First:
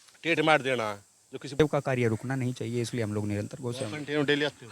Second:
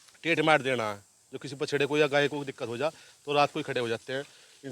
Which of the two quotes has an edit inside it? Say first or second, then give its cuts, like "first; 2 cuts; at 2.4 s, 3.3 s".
first; 1 cut; at 1.6 s